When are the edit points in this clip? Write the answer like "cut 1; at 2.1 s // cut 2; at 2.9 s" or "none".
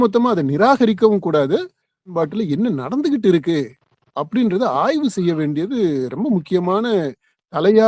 cut 1; at 2.1 s

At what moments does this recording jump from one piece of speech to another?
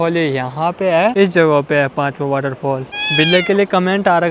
cut 1; at 1.1 s // cut 2; at 2.9 s

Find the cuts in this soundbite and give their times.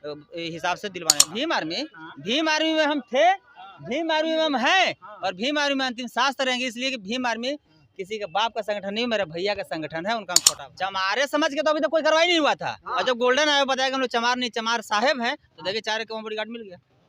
cut 1; at 1.2 s // cut 2; at 10.4 s

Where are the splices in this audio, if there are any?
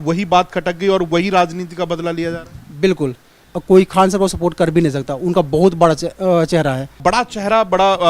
cut 1; at 3.4 s // cut 2; at 7.0 s

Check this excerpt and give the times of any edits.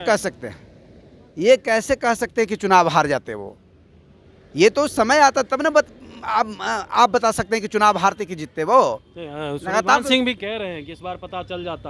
none

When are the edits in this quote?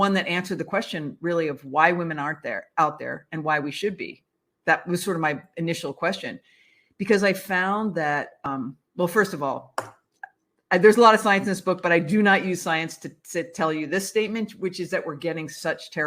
cut 1; at 8.4 s

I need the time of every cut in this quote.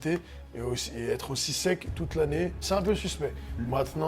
cut 1; at 2.6 s

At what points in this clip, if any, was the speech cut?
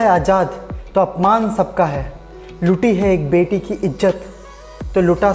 none

